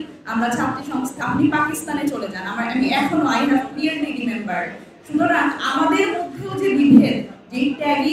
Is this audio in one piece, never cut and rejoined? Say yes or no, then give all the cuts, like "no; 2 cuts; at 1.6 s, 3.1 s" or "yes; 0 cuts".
no; 1 cut; at 1.1 s